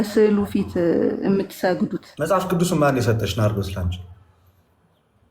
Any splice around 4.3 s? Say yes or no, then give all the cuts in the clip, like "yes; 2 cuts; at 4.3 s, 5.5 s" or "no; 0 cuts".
no; 1 cut; at 2.0 s